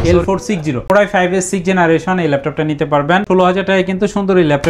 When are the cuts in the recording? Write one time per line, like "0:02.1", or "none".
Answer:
0:03.2